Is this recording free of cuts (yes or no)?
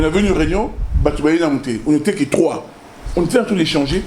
yes